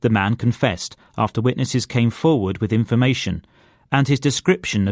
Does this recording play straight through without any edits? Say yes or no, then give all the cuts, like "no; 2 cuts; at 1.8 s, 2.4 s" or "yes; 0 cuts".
yes; 0 cuts